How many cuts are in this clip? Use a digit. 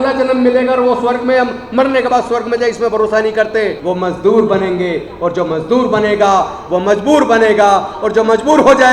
1